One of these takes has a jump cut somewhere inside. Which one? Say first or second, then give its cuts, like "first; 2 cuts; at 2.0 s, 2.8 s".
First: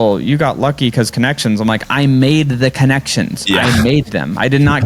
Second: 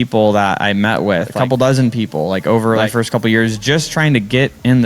second; 2 cuts; at 1.3 s, 2.9 s